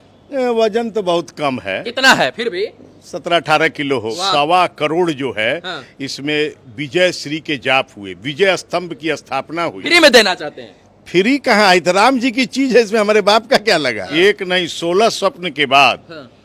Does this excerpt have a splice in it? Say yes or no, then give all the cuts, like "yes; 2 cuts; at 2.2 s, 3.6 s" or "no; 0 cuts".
yes; 3 cuts; at 4.1 s, 9.8 s, 14.0 s